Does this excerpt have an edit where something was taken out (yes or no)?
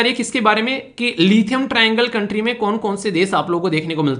no